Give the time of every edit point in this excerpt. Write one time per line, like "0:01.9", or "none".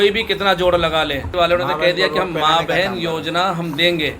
0:01.3